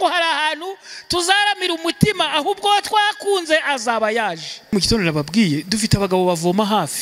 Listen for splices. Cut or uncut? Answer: cut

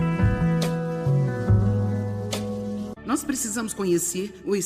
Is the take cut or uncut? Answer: cut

